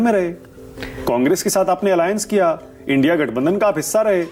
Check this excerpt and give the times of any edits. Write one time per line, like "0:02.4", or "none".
none